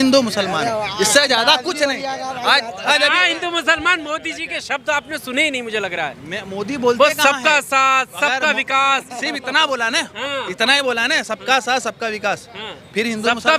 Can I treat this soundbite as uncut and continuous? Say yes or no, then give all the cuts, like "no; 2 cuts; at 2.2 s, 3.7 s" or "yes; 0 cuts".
yes; 0 cuts